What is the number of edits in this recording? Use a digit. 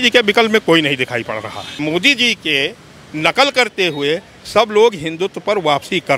1